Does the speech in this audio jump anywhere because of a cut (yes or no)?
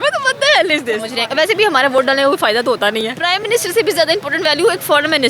yes